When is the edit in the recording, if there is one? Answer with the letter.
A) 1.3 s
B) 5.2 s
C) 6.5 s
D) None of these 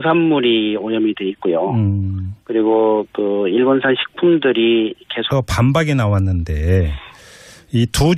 D